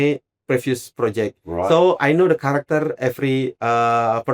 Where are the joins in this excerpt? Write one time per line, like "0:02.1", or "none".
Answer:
none

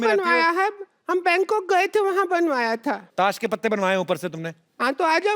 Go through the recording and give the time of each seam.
0:03.0

